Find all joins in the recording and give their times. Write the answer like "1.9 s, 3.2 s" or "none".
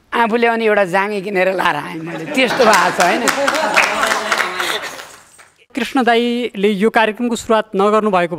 5.7 s, 6.5 s